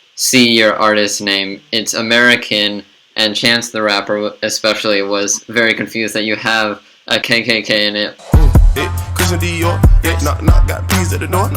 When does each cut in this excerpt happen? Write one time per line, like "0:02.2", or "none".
0:08.1